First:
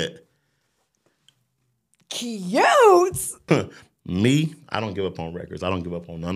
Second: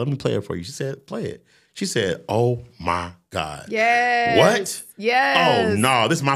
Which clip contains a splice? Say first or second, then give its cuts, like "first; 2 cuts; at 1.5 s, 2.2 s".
first; 1 cut; at 3.4 s